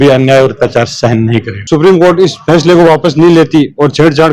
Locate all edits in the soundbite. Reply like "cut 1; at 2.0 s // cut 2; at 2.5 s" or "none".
cut 1; at 1.5 s